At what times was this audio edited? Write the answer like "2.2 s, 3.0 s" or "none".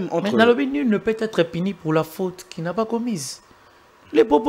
none